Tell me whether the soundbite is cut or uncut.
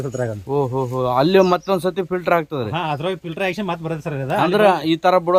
uncut